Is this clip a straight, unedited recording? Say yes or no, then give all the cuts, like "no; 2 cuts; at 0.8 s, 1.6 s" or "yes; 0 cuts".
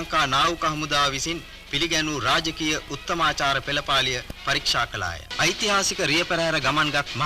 no; 1 cut; at 5.2 s